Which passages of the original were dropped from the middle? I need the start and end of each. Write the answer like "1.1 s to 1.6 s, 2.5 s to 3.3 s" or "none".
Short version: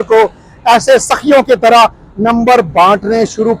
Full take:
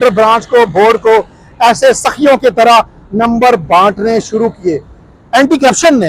none